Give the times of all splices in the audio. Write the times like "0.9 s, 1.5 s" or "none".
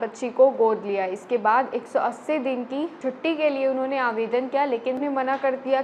3.0 s, 5.0 s